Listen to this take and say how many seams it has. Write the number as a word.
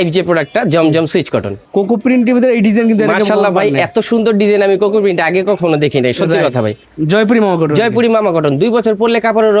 two